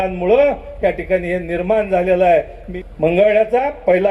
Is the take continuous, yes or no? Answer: no